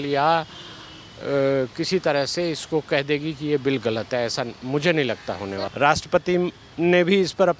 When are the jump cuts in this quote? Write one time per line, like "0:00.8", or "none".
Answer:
0:05.6